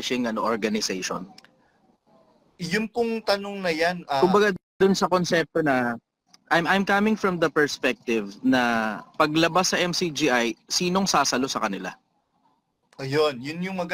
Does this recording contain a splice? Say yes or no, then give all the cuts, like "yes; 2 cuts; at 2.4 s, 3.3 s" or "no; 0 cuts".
no; 0 cuts